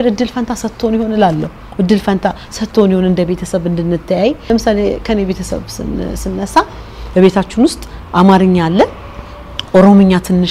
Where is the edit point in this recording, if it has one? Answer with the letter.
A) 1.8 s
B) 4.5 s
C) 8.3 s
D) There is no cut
B